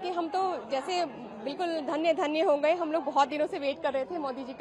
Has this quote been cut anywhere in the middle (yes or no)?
no